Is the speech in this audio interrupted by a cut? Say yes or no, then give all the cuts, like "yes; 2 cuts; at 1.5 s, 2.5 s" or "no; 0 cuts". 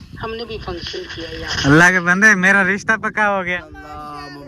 yes; 1 cut; at 3.6 s